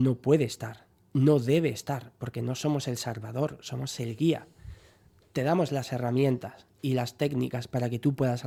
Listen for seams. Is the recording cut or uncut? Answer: uncut